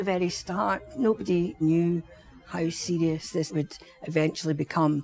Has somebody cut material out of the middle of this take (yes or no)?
yes